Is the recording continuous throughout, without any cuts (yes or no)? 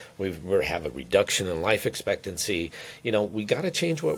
yes